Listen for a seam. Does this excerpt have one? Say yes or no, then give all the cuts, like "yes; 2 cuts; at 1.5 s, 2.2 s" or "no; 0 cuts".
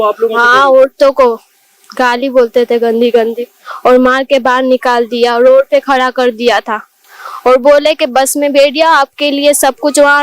no; 0 cuts